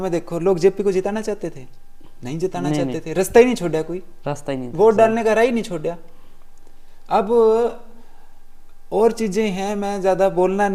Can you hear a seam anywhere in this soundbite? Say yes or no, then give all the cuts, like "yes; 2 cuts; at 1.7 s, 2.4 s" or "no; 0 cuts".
no; 0 cuts